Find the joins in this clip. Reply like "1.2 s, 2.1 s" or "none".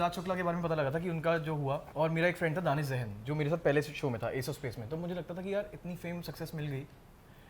1.9 s